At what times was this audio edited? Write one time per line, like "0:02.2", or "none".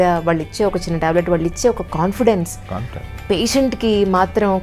none